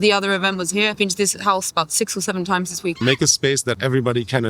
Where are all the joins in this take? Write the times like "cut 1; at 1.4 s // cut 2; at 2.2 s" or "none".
cut 1; at 1.0 s // cut 2; at 3.0 s // cut 3; at 3.8 s